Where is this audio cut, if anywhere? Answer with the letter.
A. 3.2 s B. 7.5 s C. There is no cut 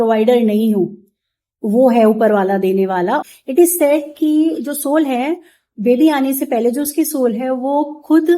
A